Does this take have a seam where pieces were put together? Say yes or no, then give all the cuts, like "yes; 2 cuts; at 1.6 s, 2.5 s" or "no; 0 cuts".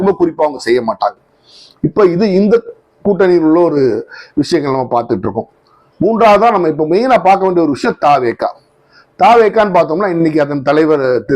no; 0 cuts